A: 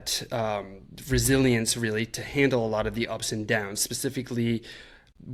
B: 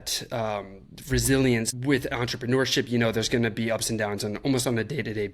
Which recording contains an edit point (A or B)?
B